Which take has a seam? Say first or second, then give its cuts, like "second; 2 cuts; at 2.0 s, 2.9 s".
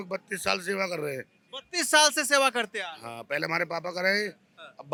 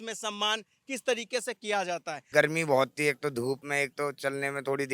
second; 2 cuts; at 2.3 s, 3.7 s